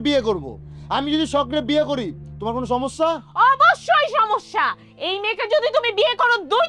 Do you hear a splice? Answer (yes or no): no